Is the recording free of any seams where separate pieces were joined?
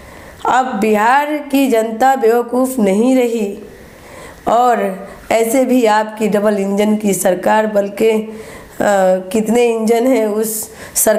yes; 0 cuts

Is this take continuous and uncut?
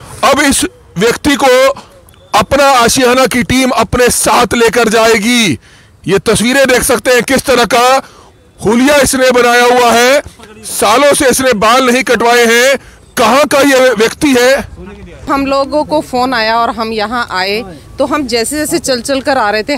no; 1 cut; at 15.2 s

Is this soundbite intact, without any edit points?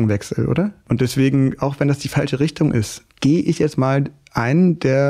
no; 2 cuts; at 0.8 s, 3.0 s

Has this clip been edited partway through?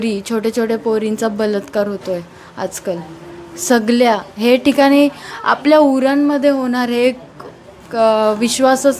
no; 0 cuts

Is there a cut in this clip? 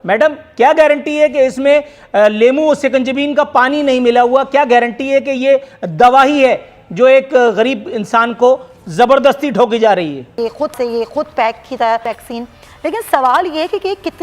yes; 2 cuts; at 10.4 s, 12.1 s

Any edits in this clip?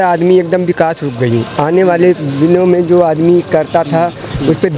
no; 0 cuts

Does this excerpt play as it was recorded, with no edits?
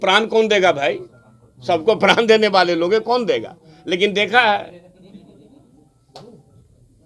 yes; 0 cuts

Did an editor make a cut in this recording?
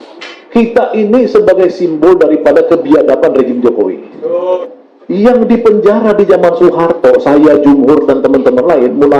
yes; 1 cut; at 4.6 s

